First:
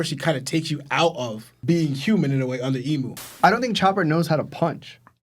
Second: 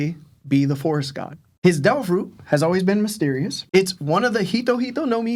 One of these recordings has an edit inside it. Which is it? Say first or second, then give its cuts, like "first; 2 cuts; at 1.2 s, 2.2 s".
first; 1 cut; at 3.4 s